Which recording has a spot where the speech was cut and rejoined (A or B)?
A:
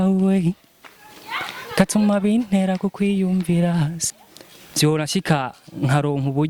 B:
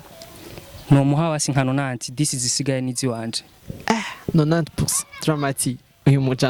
A